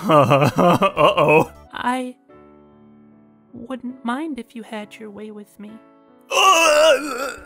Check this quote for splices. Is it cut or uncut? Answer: cut